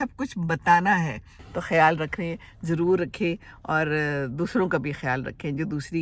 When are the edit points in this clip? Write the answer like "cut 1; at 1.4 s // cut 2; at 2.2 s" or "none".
cut 1; at 1.5 s